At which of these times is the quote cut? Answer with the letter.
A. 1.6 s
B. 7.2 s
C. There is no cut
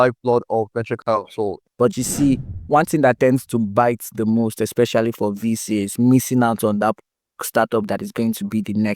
A